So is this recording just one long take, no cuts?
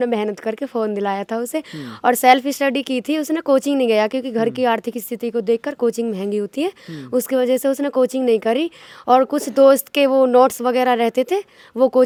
yes; 0 cuts

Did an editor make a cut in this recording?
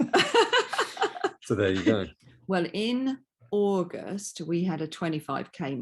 yes; 1 cut; at 2.2 s

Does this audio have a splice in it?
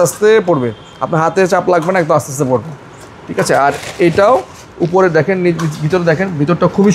no; 0 cuts

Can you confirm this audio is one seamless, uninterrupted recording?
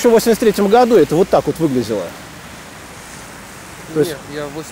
yes; 0 cuts

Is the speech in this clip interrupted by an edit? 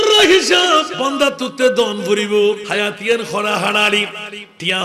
yes; 2 cuts; at 0.9 s, 2.7 s

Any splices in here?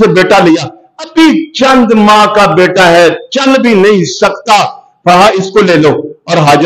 no; 0 cuts

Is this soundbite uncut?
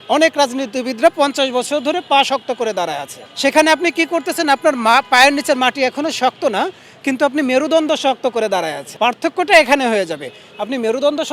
yes; 0 cuts

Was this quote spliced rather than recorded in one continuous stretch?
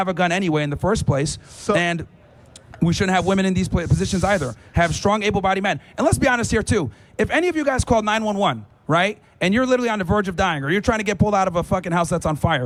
no; 0 cuts

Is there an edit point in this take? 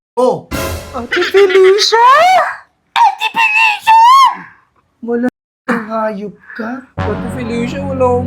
no; 0 cuts

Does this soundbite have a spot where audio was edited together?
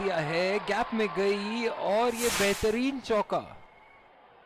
yes; 1 cut; at 3.5 s

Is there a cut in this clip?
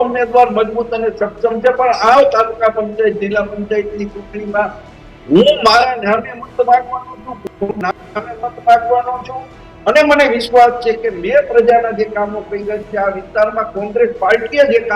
no; 0 cuts

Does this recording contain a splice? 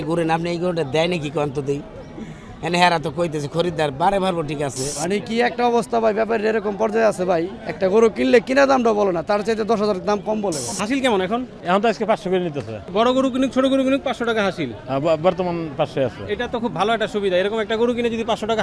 yes; 4 cuts; at 4.9 s, 10.7 s, 11.5 s, 12.9 s

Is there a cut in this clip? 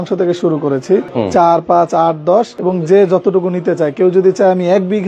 yes; 2 cuts; at 1.1 s, 2.6 s

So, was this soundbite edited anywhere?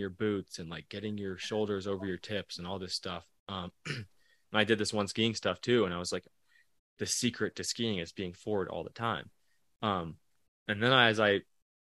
no; 0 cuts

